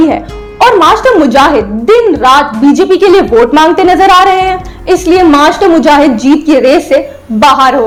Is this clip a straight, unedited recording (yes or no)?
yes